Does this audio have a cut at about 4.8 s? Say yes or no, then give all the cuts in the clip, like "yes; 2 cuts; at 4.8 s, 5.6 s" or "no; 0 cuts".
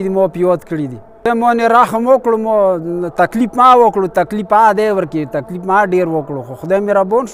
no; 1 cut; at 1.2 s